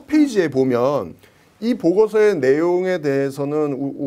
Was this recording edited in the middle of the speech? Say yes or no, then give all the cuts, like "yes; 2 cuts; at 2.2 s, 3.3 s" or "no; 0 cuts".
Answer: no; 0 cuts